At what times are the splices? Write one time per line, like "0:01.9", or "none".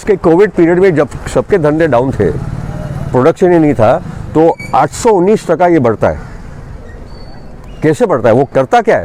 none